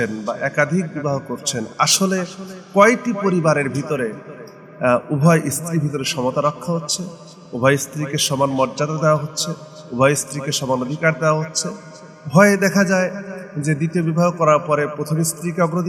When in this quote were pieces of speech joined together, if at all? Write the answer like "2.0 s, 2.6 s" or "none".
none